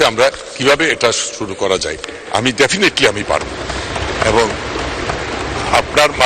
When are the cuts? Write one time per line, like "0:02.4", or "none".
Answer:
none